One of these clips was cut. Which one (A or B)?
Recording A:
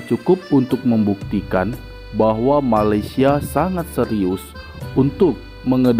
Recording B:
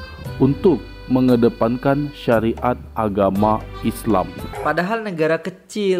B